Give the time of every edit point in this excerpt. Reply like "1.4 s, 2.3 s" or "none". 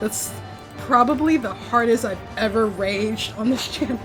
none